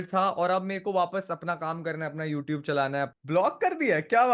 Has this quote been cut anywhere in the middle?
yes; 1 cut; at 3.1 s

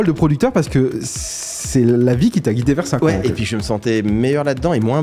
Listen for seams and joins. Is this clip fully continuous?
yes; 0 cuts

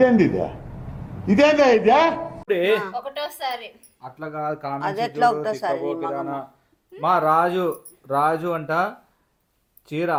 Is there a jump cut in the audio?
no; 0 cuts

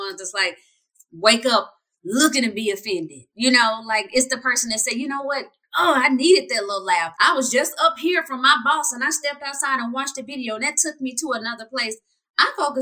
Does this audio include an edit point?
no; 0 cuts

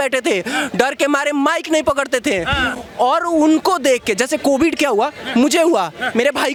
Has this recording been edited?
no; 0 cuts

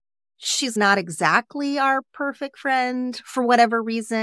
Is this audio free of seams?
yes; 0 cuts

